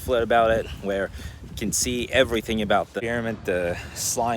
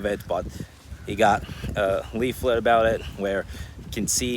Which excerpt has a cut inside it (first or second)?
first